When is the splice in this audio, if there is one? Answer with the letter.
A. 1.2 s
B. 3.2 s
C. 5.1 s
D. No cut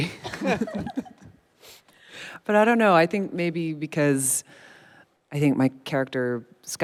D